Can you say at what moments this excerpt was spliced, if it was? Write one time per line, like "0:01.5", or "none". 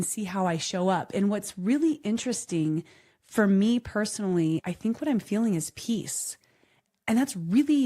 0:04.6